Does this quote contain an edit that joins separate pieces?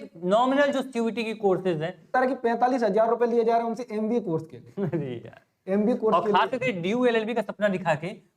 yes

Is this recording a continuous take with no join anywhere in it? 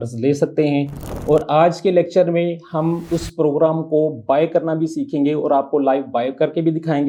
yes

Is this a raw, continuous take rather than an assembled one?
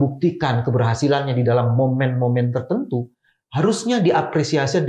yes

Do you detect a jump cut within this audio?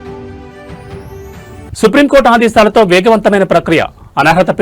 yes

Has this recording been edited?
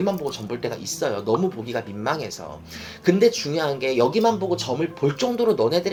no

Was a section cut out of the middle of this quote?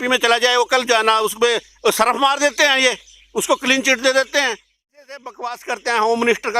yes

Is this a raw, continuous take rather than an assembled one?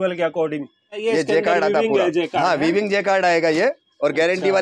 no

